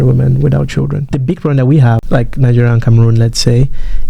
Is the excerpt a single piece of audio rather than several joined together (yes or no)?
no